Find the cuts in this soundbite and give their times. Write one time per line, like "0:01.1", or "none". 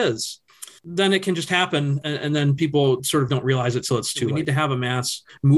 0:04.4